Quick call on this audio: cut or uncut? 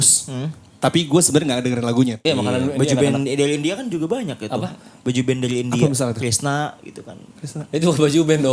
cut